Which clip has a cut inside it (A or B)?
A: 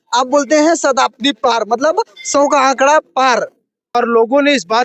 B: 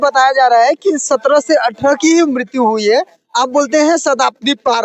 A